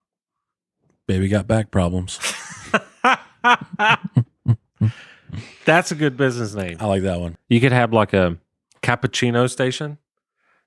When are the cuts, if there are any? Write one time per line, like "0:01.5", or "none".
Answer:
0:07.3